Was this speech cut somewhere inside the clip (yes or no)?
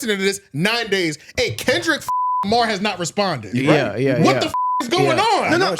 no